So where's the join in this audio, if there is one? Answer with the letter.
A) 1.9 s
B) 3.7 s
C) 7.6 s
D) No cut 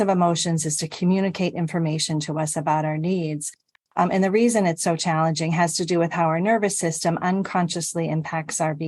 B